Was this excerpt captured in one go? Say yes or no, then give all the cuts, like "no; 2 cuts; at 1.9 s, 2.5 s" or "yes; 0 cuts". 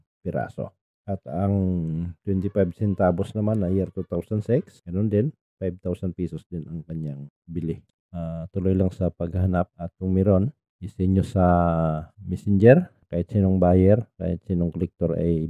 no; 1 cut; at 7.9 s